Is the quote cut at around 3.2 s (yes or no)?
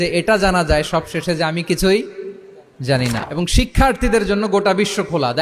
yes